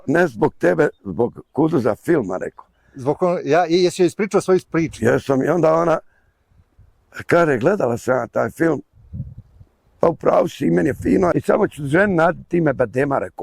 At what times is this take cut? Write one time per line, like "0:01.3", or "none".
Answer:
0:11.3